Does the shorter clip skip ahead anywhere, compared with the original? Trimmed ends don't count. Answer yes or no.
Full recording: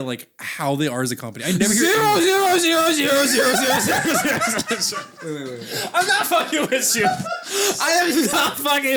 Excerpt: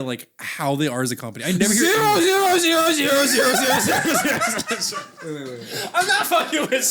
no